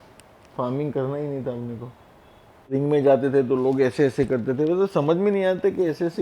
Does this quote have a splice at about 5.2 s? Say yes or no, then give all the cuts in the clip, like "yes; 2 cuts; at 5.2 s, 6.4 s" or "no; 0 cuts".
no; 1 cut; at 2.7 s